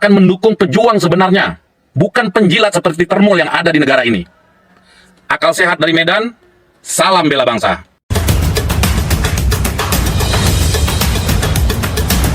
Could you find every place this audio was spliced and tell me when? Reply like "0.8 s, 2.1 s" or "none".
7.9 s